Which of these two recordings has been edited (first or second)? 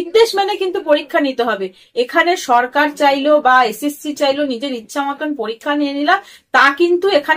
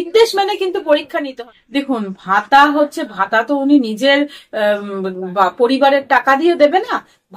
second